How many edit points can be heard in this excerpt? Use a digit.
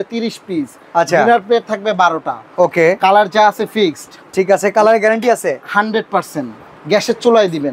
0